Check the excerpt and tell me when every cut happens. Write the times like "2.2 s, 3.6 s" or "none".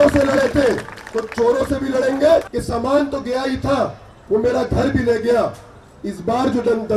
2.5 s